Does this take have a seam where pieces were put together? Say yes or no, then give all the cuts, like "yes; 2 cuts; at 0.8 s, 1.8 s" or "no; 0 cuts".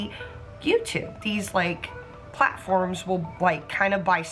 yes; 1 cut; at 1.1 s